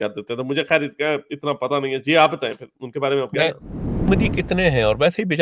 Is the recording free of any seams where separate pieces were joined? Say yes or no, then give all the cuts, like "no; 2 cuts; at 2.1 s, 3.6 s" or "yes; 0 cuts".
no; 1 cut; at 4.1 s